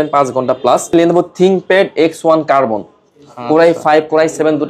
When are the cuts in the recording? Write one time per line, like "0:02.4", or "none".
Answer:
0:00.9